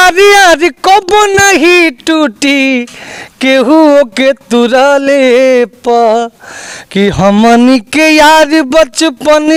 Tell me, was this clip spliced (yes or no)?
no